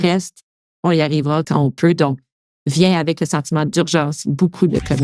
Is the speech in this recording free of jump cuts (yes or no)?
no